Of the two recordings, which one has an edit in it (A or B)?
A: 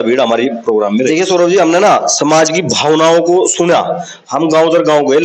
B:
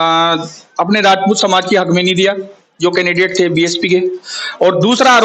A